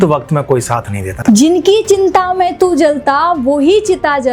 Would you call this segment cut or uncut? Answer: cut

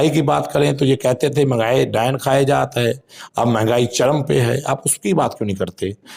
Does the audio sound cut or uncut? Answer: uncut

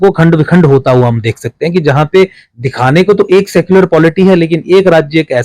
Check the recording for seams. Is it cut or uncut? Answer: uncut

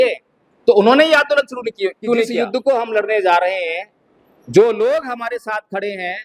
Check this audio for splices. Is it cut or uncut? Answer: cut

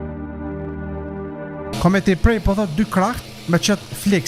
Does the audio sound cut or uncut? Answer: cut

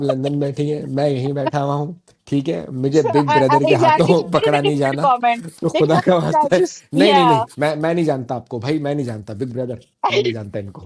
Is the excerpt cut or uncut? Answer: uncut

